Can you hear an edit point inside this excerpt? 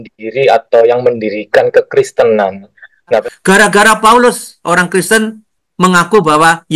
yes; 1 cut; at 3.2 s

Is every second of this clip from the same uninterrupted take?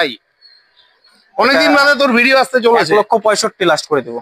yes; 0 cuts

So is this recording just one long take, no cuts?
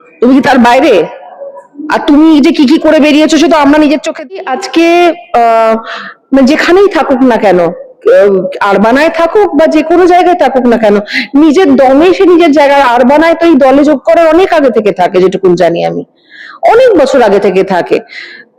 no; 1 cut; at 4.5 s

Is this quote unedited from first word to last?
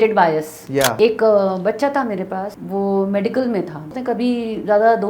no; 3 cuts; at 0.9 s, 2.6 s, 3.9 s

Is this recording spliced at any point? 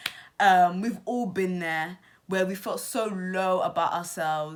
no; 0 cuts

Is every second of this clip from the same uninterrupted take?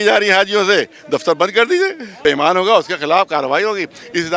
no; 1 cut; at 2.2 s

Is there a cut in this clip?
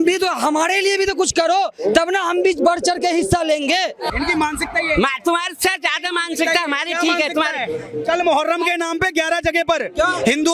yes; 1 cut; at 4.1 s

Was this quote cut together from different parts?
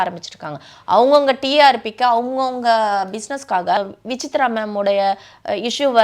yes; 1 cut; at 3.8 s

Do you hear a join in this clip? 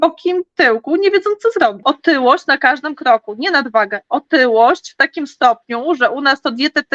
yes; 1 cut; at 1.8 s

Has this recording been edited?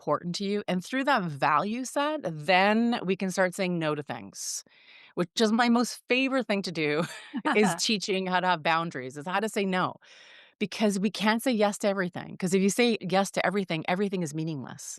yes; 1 cut; at 13.0 s

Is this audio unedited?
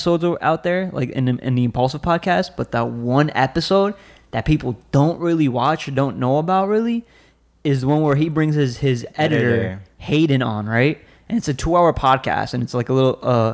yes; 0 cuts

